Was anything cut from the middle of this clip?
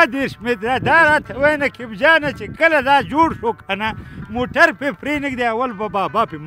no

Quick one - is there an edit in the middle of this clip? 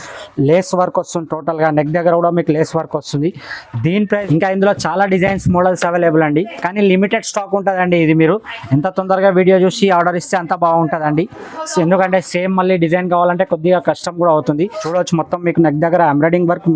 yes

